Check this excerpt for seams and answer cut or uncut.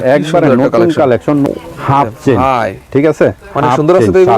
cut